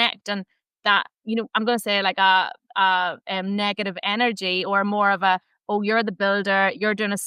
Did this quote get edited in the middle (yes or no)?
no